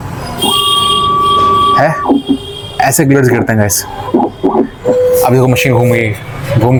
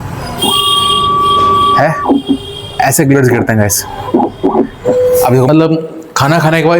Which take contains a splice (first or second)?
second